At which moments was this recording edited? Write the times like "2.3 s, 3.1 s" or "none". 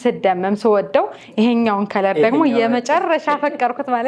none